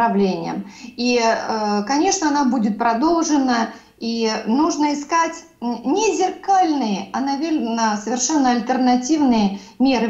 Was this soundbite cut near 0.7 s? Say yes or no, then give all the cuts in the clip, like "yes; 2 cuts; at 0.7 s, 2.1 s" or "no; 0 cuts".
no; 0 cuts